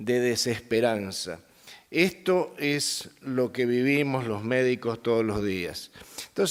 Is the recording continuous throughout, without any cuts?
yes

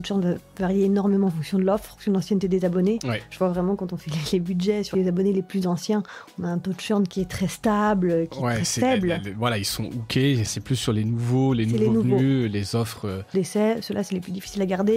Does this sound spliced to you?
yes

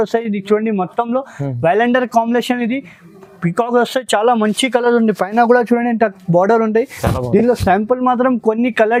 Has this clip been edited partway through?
no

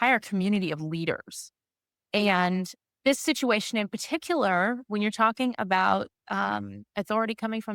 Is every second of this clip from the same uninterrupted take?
yes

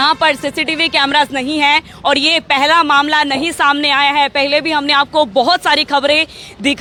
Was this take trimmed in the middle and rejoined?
no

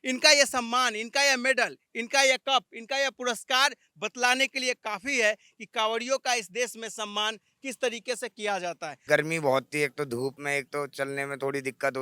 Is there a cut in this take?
yes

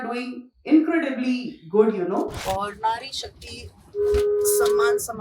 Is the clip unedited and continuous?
no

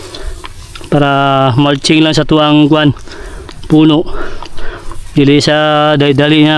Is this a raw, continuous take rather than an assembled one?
yes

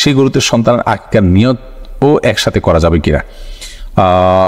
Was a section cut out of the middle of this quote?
no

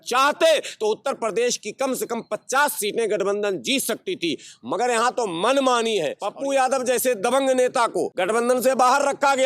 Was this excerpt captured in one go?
no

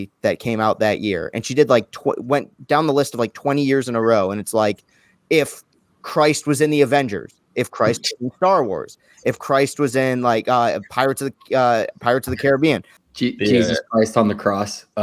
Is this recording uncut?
no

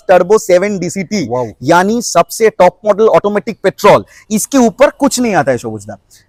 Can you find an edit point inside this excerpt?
no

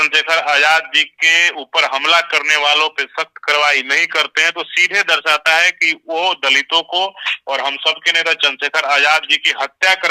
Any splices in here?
no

